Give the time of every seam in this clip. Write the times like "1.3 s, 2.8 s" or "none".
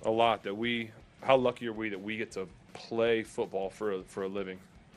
none